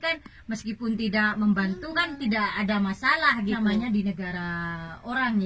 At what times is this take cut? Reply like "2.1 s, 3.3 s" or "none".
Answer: 3.6 s